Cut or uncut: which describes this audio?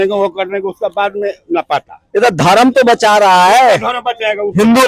cut